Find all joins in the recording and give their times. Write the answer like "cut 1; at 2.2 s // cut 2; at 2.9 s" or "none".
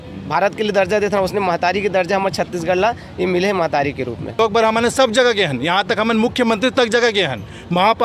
cut 1; at 4.4 s

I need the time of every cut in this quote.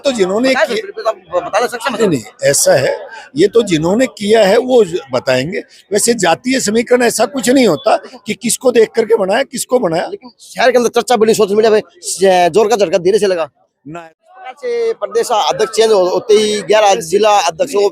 cut 1; at 13.9 s

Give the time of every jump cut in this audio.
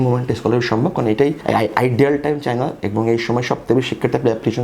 cut 1; at 1.4 s

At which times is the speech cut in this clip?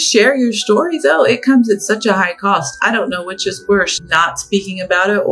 cut 1; at 4.0 s

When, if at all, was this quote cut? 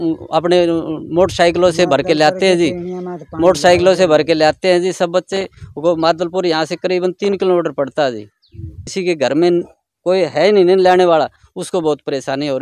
cut 1; at 8.8 s

